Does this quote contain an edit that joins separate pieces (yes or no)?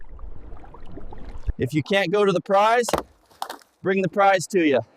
yes